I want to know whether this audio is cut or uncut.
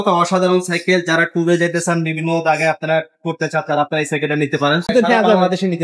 cut